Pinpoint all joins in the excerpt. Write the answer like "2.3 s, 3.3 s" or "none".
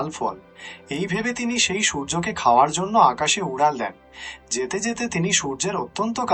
none